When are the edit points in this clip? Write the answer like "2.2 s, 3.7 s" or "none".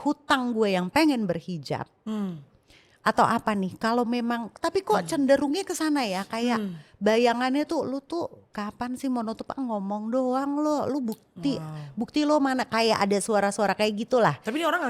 none